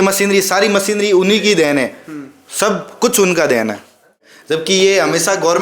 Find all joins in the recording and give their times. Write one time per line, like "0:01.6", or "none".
0:04.2

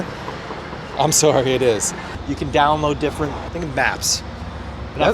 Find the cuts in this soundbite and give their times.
0:02.1
0:03.5

